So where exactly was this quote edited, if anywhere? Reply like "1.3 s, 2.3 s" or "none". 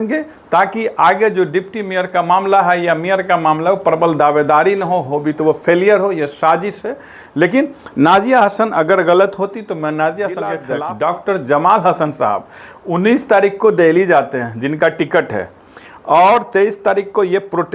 10.6 s

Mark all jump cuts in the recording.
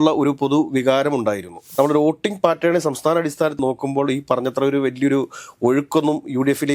1.6 s

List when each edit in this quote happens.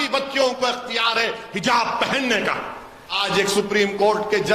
3.0 s

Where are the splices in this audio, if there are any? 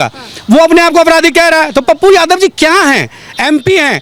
none

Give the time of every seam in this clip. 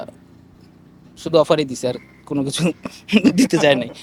none

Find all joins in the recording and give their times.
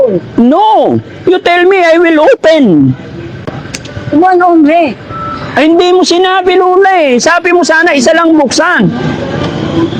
none

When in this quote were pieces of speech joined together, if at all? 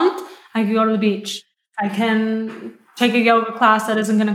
1.3 s

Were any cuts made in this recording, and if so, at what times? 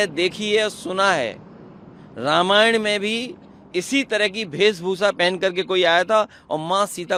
none

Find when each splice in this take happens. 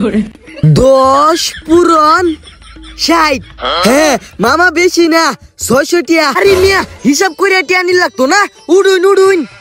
6.3 s

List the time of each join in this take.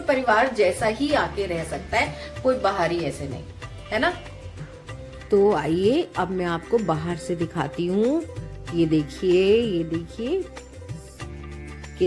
none

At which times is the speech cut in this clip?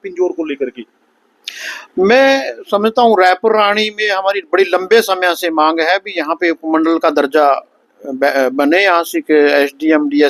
none

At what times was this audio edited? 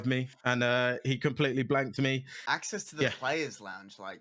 2.3 s

